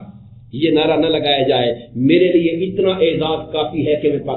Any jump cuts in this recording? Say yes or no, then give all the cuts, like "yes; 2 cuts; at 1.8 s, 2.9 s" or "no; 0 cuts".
no; 0 cuts